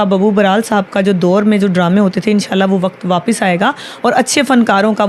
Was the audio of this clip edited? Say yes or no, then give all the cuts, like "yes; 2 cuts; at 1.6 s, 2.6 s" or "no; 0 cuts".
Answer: no; 0 cuts